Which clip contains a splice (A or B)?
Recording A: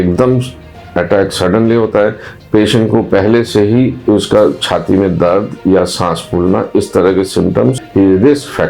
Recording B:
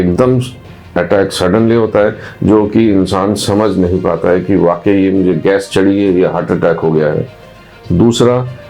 A